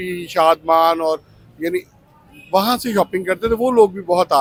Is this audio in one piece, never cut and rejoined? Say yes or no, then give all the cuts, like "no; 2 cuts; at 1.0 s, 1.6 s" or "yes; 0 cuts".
yes; 0 cuts